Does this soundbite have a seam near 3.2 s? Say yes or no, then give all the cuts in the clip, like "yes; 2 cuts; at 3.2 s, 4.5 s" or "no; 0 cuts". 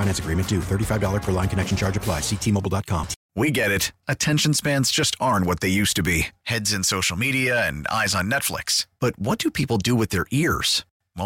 yes; 1 cut; at 3.2 s